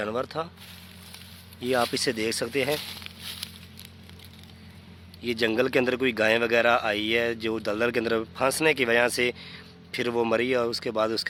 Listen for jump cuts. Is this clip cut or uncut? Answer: uncut